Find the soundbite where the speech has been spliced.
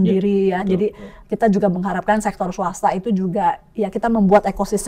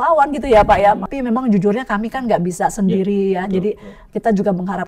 second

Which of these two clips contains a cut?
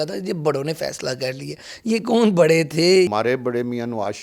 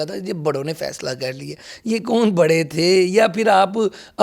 first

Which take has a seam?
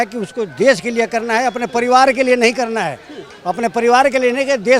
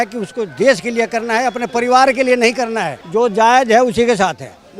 second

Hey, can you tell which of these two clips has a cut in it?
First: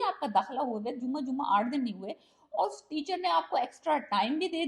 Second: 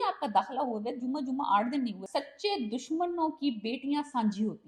second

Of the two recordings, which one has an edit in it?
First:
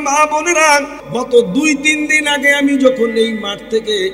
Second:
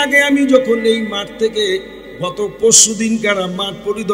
first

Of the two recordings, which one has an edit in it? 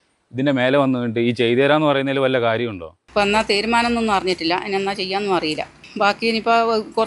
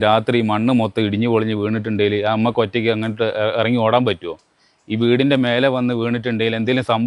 first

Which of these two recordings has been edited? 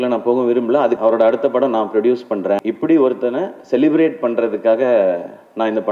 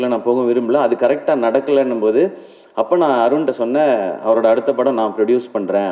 first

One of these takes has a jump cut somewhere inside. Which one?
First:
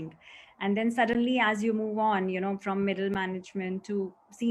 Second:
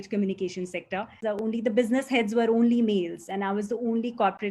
second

